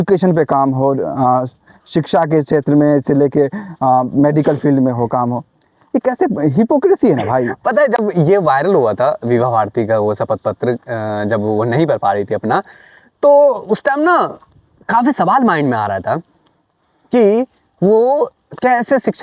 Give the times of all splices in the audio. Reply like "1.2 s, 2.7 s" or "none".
none